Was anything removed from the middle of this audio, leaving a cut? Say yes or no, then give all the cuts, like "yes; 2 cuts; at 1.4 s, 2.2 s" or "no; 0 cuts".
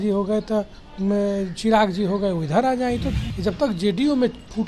yes; 1 cut; at 3.3 s